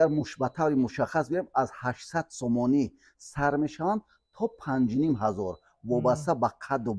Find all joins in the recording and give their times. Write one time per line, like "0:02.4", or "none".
none